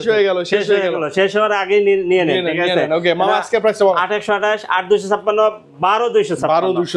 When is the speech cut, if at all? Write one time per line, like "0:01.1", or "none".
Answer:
none

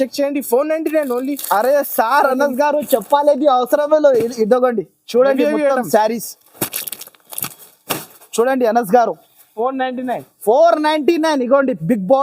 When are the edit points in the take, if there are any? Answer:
none

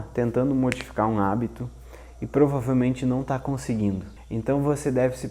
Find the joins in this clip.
0:04.2

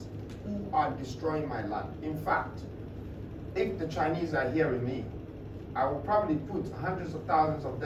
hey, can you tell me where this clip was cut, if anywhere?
none

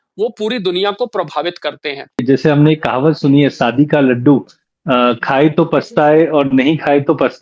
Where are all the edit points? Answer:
0:02.2

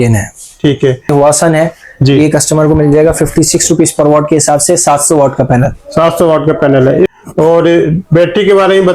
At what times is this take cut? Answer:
0:01.1
0:07.1

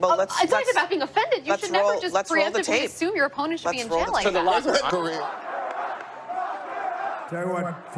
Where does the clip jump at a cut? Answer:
0:04.9

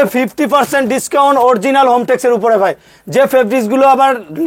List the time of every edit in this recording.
none

